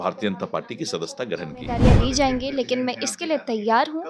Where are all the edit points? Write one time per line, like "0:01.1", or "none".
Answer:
0:01.8

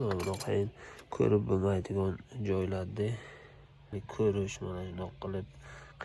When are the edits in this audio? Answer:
0:03.9

